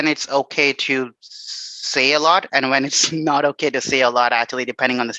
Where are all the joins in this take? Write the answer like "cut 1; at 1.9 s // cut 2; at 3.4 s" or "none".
none